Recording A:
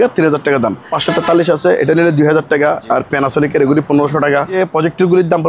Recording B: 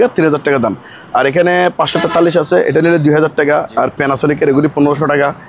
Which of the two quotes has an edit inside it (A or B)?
A